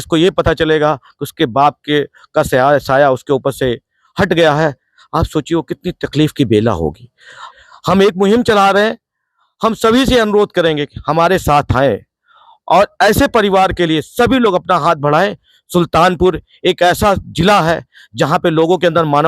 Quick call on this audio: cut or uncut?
cut